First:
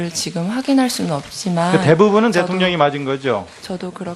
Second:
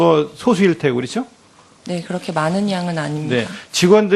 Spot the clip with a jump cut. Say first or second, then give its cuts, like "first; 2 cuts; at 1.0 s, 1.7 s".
second; 1 cut; at 2.1 s